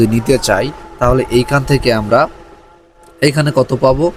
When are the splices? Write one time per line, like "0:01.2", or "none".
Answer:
none